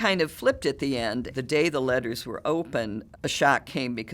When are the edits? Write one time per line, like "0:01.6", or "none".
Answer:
0:01.3
0:03.0